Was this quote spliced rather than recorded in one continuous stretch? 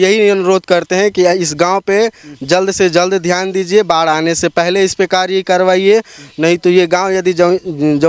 no; 0 cuts

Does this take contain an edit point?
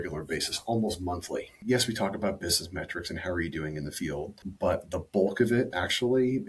yes; 2 cuts; at 1.6 s, 4.4 s

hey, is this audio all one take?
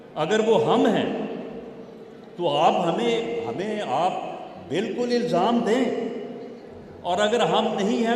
yes; 0 cuts

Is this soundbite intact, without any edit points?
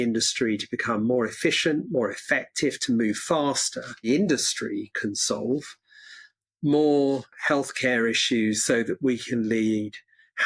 no; 2 cuts; at 4.1 s, 7.3 s

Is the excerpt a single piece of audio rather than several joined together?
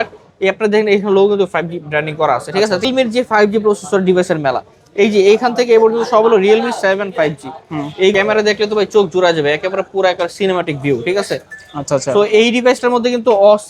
no; 2 cuts; at 2.9 s, 8.1 s

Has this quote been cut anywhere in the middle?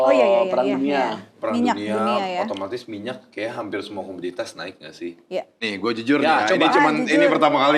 yes; 1 cut; at 5.5 s

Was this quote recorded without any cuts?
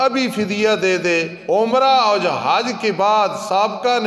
no; 1 cut; at 1.3 s

